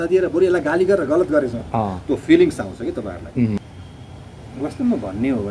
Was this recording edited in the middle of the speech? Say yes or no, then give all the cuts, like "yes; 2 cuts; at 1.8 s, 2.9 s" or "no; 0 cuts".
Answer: yes; 1 cut; at 3.6 s